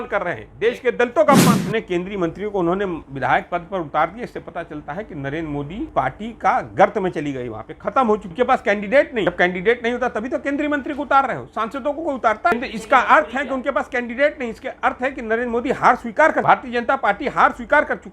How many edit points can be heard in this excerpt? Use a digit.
6